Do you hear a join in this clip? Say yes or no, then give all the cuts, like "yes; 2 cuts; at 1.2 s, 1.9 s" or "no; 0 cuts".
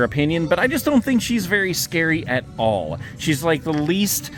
no; 0 cuts